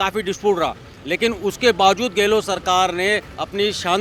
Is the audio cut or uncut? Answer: uncut